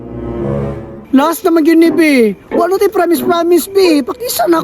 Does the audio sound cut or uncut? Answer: cut